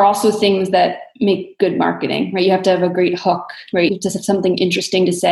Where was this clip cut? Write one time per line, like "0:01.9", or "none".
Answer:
0:03.9